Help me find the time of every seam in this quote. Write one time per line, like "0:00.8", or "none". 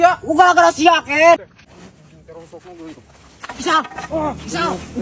0:01.5